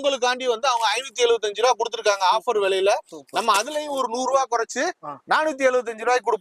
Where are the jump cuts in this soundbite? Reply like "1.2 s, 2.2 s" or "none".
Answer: none